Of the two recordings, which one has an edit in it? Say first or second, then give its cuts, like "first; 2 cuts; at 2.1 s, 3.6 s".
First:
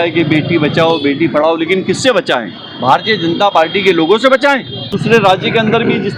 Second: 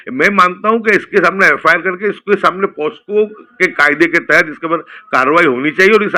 first; 1 cut; at 4.9 s